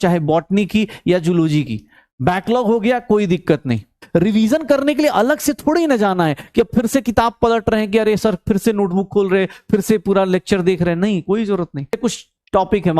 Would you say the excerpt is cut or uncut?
cut